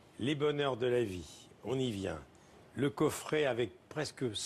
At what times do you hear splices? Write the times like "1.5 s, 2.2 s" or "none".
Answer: 1.3 s